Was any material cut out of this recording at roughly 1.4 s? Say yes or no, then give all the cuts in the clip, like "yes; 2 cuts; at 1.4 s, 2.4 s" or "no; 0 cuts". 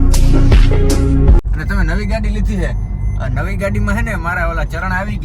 yes; 1 cut; at 1.4 s